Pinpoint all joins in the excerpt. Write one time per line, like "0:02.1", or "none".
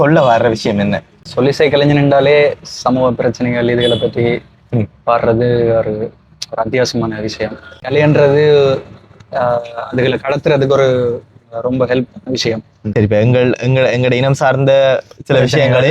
0:01.2
0:07.7